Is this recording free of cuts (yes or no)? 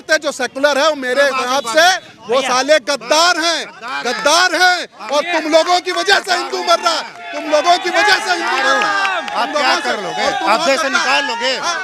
yes